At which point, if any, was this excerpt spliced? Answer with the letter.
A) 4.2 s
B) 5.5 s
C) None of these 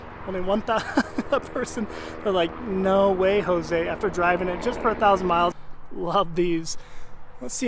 B